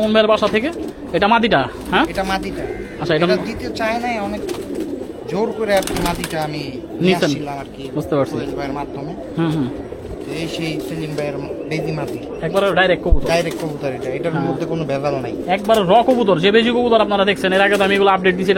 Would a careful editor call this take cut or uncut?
uncut